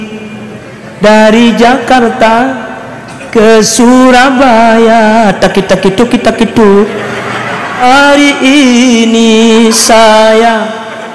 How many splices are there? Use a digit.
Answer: 1